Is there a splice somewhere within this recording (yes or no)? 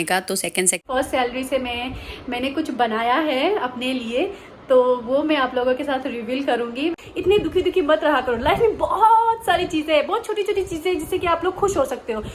yes